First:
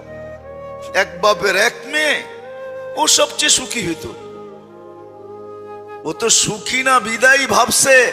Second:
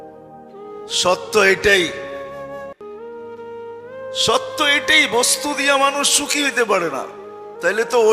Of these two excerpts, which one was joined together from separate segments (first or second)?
second